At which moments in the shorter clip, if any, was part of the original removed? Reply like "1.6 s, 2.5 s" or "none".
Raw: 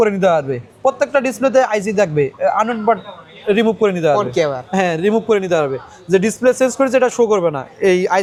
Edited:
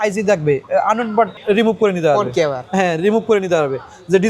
1.4 s